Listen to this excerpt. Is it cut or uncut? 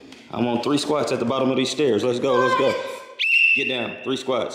uncut